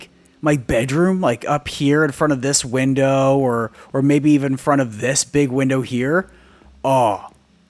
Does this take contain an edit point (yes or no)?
no